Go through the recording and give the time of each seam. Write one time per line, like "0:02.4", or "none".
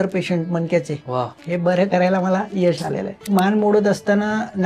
0:03.3